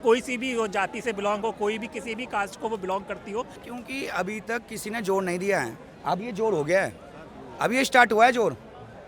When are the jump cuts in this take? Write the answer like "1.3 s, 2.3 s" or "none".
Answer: 3.6 s